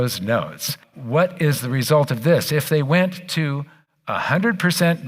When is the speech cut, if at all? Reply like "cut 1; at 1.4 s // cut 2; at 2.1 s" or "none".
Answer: cut 1; at 0.9 s